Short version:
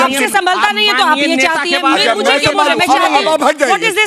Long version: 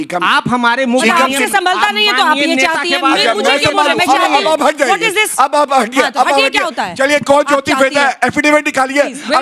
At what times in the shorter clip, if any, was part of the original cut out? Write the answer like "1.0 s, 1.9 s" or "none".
none